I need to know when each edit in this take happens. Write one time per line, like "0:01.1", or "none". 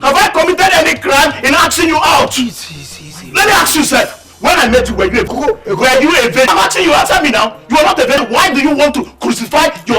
0:05.3
0:06.5
0:08.2

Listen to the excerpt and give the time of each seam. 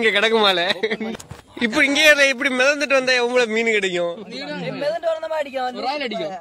0:01.1

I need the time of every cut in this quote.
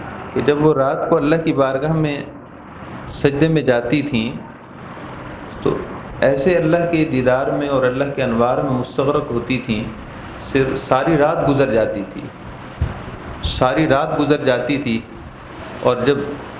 none

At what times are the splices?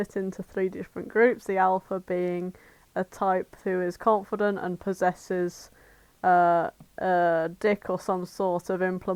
none

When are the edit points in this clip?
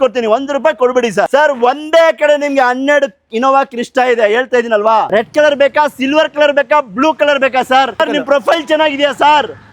0:01.3
0:05.1
0:08.0

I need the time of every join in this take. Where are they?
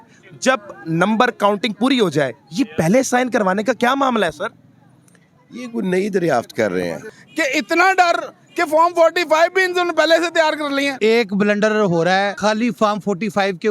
0:07.2
0:10.9
0:12.3

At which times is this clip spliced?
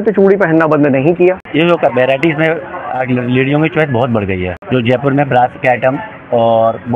0:01.4
0:04.6

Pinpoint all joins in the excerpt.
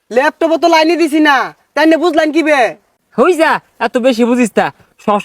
none

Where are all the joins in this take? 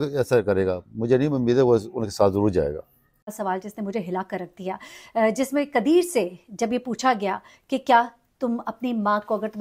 0:03.3

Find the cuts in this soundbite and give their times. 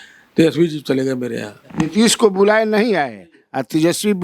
0:01.7

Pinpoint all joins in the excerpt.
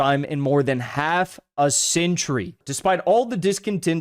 0:02.6

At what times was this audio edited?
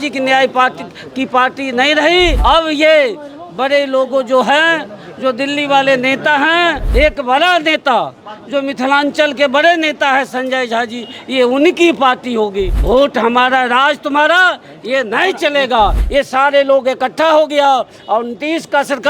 0:02.4
0:06.8
0:12.7
0:16.0

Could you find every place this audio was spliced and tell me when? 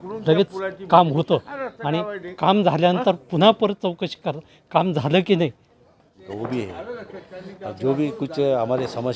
0:06.2

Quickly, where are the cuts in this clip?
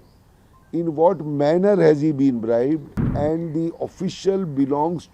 0:03.0

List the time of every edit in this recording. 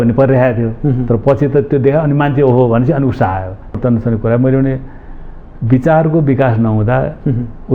0:03.8

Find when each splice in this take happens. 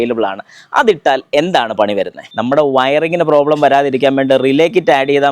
0:02.2

